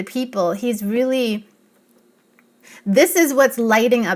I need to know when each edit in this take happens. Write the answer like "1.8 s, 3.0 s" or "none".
2.5 s